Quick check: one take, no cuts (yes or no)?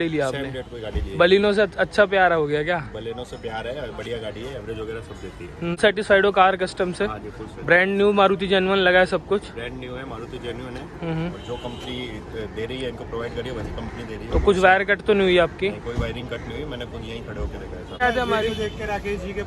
no